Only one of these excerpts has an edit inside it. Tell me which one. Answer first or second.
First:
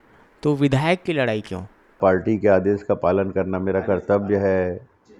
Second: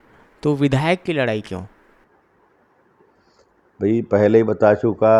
first